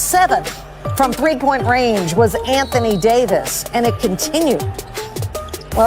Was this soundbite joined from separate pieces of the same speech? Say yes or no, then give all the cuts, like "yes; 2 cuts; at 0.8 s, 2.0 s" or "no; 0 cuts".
no; 0 cuts